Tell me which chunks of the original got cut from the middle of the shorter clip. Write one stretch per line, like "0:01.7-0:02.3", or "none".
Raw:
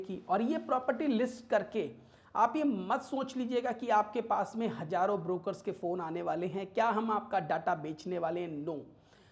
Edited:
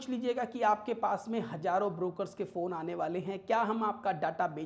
none